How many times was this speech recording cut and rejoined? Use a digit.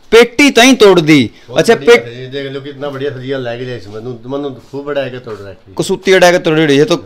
0